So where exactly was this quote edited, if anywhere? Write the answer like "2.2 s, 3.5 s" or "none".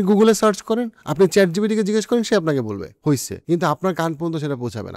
3.2 s